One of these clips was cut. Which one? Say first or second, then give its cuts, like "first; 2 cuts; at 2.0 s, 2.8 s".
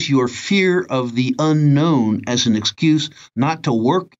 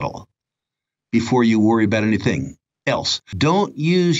second; 1 cut; at 3.2 s